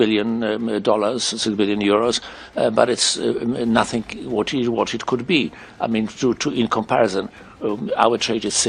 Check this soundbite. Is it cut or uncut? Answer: uncut